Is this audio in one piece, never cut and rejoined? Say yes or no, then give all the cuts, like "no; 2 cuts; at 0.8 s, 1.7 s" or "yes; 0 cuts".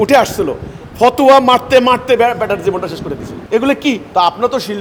yes; 0 cuts